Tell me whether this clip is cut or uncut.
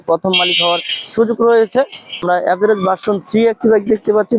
cut